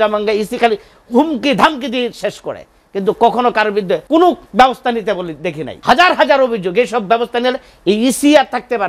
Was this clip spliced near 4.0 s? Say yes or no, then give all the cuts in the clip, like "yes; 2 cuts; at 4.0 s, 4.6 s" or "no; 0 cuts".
yes; 2 cuts; at 4.0 s, 5.7 s